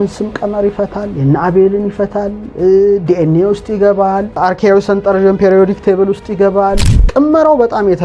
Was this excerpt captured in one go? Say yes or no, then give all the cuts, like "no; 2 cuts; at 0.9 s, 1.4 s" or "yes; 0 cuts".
no; 1 cut; at 7.0 s